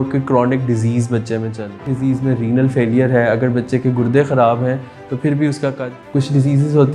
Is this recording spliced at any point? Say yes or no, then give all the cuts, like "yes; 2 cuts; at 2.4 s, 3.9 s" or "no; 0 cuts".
yes; 2 cuts; at 1.8 s, 5.8 s